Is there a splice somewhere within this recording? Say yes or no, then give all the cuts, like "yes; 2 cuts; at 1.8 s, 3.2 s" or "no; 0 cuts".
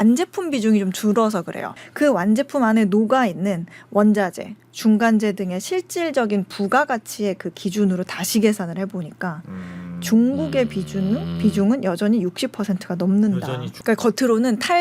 yes; 2 cuts; at 1.8 s, 13.7 s